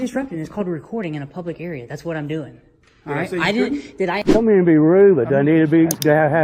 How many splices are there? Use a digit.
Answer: 1